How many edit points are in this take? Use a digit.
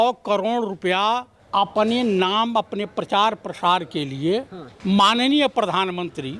2